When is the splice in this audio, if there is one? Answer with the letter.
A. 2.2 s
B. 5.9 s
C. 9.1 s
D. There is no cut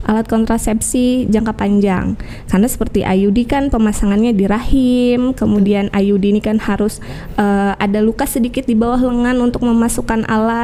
D